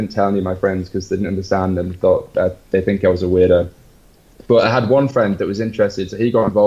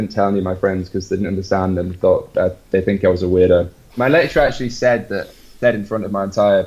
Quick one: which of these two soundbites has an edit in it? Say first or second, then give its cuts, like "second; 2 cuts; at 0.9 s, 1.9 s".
second; 1 cut; at 3.9 s